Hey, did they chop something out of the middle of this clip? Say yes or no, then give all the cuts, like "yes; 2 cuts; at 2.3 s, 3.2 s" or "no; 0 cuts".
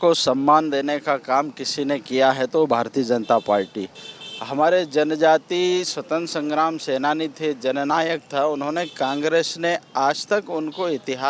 no; 0 cuts